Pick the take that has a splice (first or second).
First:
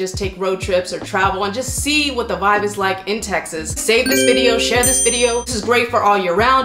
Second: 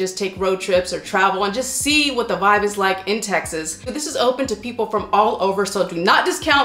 first